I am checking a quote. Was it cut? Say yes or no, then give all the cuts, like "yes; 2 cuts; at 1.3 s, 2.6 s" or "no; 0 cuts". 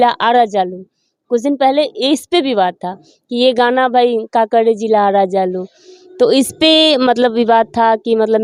no; 0 cuts